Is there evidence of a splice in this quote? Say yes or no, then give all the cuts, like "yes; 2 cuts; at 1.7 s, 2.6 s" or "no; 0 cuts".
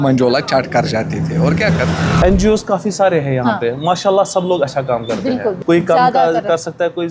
yes; 2 cuts; at 2.2 s, 5.6 s